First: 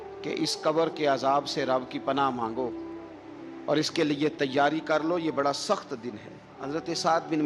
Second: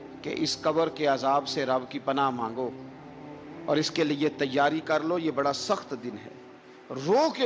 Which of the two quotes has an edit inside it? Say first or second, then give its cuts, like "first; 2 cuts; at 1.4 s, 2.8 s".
first; 1 cut; at 6.5 s